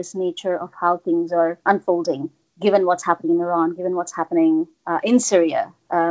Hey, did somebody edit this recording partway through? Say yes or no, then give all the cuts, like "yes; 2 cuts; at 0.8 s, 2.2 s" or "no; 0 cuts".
yes; 1 cut; at 1.6 s